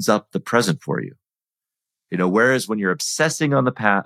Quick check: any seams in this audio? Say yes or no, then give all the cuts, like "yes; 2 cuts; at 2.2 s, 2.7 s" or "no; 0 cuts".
no; 0 cuts